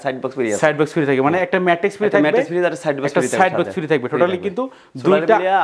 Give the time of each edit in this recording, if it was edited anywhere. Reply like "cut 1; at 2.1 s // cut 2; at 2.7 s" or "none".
none